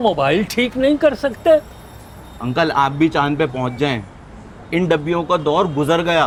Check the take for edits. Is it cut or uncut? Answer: uncut